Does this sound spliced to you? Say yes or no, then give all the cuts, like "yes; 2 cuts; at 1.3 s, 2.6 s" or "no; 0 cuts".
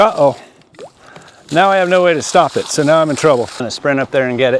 yes; 1 cut; at 3.7 s